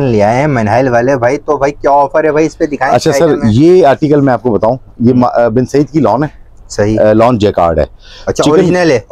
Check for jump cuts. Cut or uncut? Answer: uncut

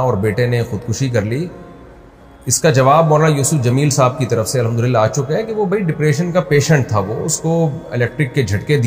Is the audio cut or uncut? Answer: uncut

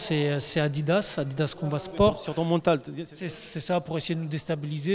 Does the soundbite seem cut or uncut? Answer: cut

